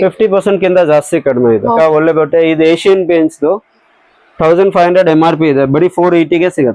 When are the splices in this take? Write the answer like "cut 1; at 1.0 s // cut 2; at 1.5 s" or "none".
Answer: cut 1; at 1.8 s